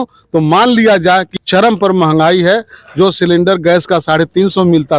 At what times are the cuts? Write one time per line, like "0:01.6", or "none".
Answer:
0:01.3